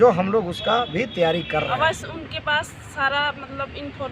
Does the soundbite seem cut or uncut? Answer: cut